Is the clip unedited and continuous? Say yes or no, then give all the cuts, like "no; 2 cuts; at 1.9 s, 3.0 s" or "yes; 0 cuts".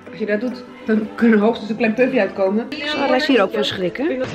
no; 1 cut; at 2.8 s